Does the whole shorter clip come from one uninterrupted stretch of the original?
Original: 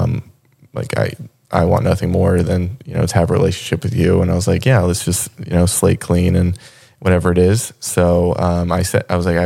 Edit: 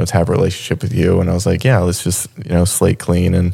yes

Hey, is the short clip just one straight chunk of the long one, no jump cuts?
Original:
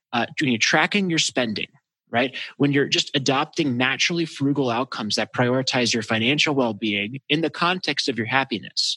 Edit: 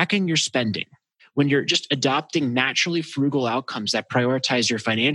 no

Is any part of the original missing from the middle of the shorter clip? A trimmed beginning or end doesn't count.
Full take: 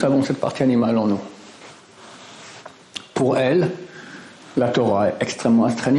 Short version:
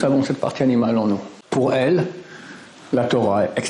yes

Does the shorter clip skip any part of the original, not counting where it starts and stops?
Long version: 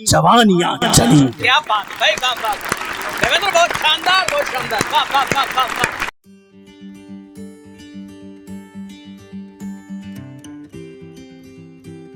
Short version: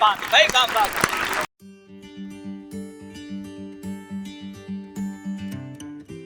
yes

